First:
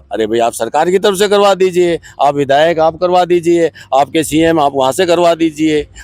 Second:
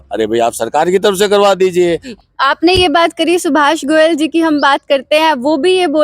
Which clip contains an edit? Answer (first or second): second